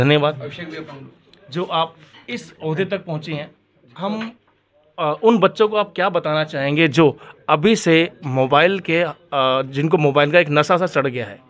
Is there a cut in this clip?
no; 0 cuts

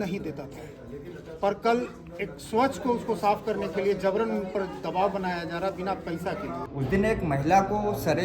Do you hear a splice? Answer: yes; 1 cut; at 6.6 s

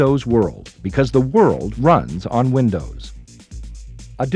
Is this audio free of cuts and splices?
yes; 0 cuts

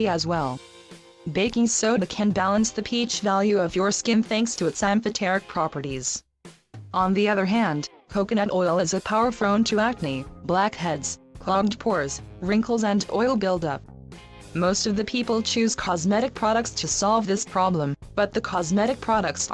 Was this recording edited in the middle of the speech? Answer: no; 0 cuts

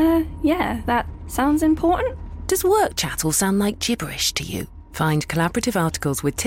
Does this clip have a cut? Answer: no; 0 cuts

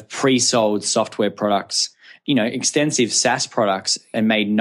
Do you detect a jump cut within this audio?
no; 0 cuts

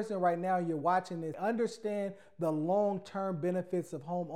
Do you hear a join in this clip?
yes; 1 cut; at 1.3 s

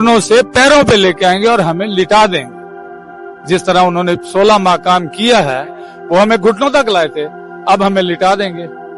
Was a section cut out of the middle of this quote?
no; 0 cuts

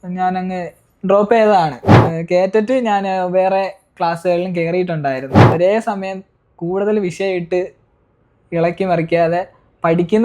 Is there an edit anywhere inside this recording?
yes; 2 cuts; at 1.9 s, 5.5 s

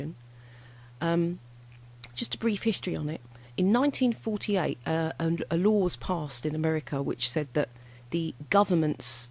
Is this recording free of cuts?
no; 1 cut; at 2.0 s

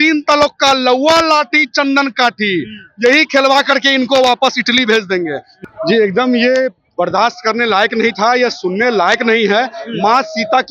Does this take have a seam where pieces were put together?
yes; 1 cut; at 5.5 s

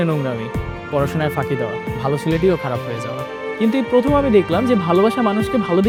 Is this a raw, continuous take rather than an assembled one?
yes; 0 cuts

